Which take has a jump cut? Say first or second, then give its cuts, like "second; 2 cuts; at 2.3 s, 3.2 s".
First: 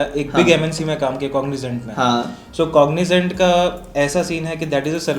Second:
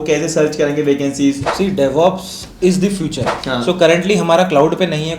second; 2 cuts; at 1.5 s, 3.3 s